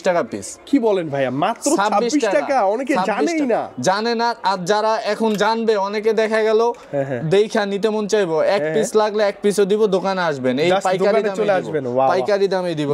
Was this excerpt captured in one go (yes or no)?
yes